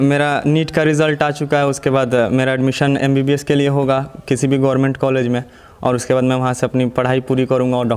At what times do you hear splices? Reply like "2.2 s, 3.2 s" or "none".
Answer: none